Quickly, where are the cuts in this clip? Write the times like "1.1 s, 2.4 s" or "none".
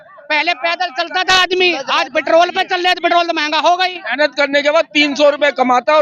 none